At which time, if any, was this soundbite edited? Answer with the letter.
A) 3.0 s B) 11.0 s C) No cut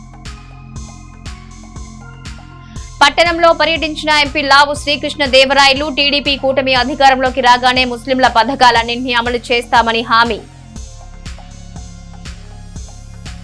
A